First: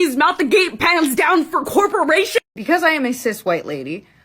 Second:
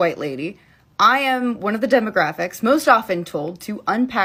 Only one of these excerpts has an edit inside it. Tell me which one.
first; 1 cut; at 2.5 s

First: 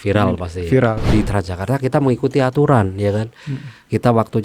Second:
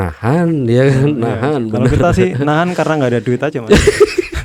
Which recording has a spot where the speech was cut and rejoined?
first; 1 cut; at 1.1 s

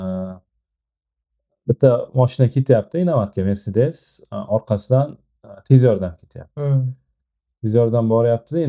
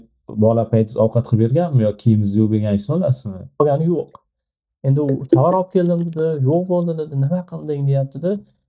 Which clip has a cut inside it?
second; 1 cut; at 3.6 s

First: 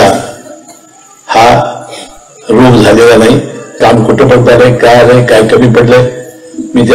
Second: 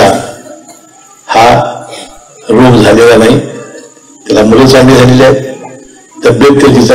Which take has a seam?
first; 1 cut; at 3.8 s

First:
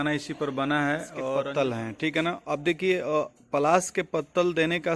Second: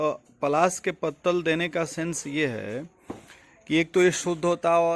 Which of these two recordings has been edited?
first; 1 cut; at 1.4 s

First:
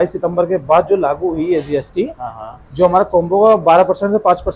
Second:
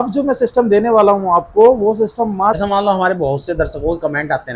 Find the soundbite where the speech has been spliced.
second; 1 cut; at 2.6 s

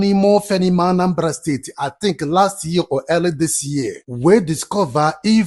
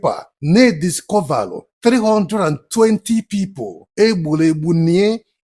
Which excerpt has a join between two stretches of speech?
first; 1 cut; at 4.0 s

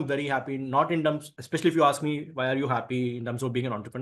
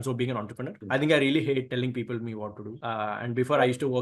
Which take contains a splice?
second; 2 cuts; at 1.7 s, 2.7 s

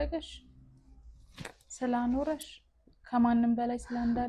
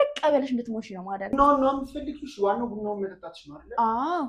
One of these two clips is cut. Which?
second; 1 cut; at 1.3 s

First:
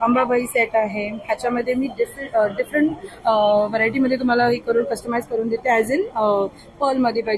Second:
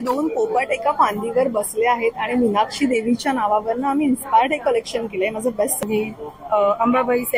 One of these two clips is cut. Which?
second; 1 cut; at 5.8 s

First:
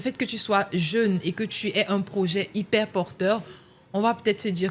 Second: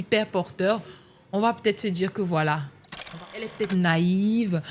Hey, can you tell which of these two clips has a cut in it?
second; 1 cut; at 3.1 s

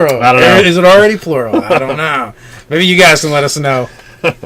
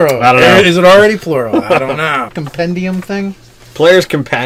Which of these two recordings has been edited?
first; 1 cut; at 2.4 s

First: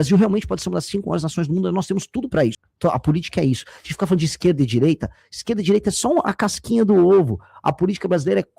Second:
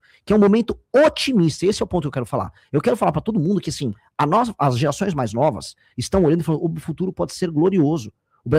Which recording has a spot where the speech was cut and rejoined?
first; 1 cut; at 2.7 s

